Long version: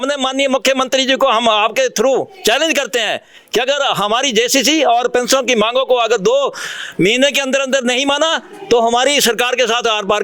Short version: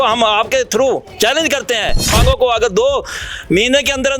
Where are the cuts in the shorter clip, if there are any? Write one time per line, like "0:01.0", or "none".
0:02.2

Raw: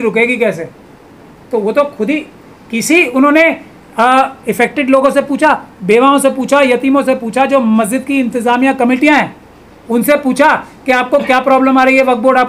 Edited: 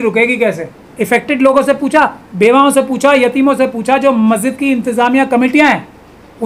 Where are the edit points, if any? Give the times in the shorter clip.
0:00.9

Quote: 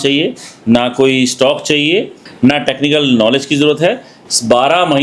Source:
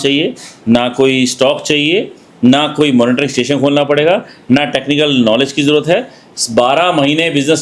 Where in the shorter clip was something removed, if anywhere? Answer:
0:02.3

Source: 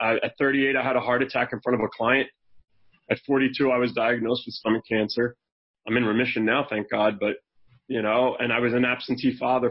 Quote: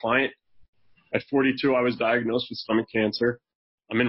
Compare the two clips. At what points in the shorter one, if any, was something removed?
none

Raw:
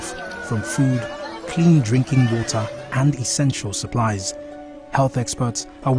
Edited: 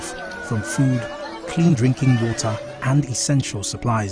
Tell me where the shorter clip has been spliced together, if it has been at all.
0:01.7

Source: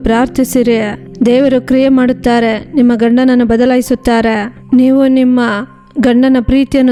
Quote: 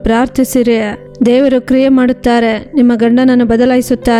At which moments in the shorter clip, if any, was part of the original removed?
none

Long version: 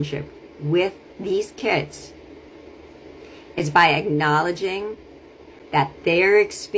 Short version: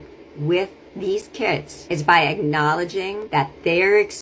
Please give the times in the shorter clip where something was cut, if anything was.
0:01.7
0:03.2

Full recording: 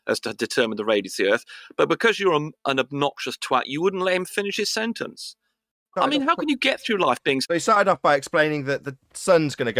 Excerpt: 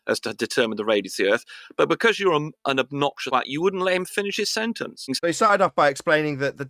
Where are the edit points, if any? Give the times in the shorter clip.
0:03.2
0:05.1

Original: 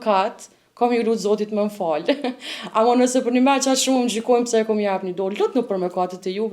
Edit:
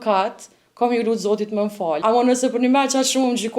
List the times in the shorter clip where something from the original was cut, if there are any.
0:02.0

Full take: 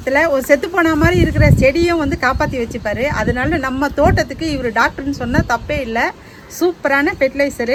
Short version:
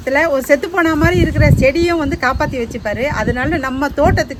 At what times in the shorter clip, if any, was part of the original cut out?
none

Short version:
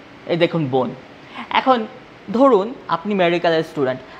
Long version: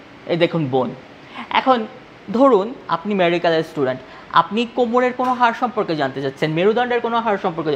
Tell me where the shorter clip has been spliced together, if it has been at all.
none

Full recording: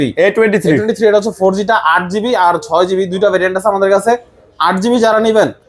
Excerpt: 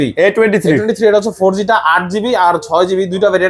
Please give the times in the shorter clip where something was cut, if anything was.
none

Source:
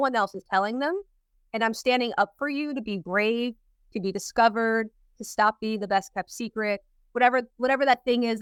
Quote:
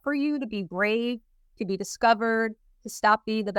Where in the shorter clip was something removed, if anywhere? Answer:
none

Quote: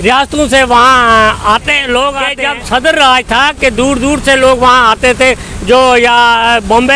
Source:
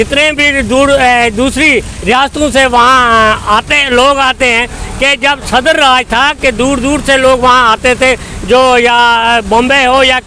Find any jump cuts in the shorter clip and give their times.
0:02.3

